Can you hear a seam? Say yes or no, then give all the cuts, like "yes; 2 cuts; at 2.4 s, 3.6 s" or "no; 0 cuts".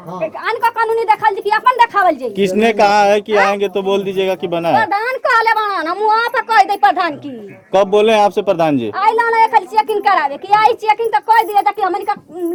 no; 0 cuts